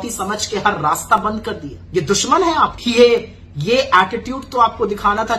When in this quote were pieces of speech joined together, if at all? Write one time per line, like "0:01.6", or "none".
0:01.7
0:02.8